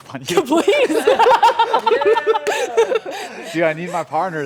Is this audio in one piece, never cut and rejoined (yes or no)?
yes